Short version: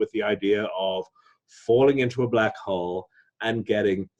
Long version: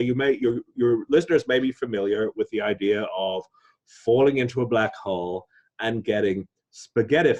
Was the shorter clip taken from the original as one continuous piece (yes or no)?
yes